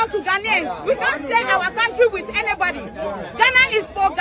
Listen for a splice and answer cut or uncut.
uncut